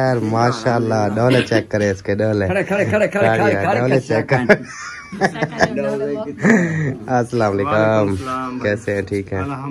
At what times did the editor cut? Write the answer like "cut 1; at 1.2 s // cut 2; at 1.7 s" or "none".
none